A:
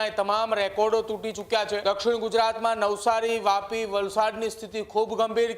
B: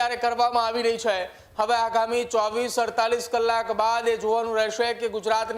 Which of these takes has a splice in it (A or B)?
A